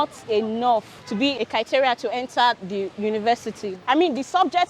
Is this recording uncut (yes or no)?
no